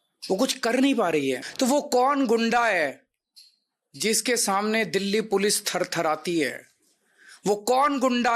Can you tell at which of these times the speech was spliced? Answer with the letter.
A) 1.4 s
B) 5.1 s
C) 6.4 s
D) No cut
A